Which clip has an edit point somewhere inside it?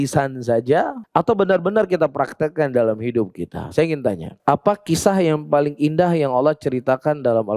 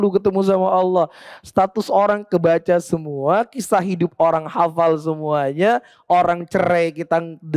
first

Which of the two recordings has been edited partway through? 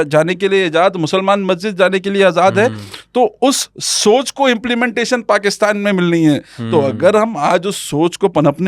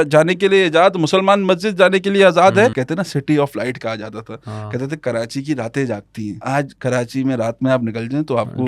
second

